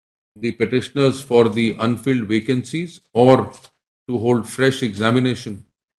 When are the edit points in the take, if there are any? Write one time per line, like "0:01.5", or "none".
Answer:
none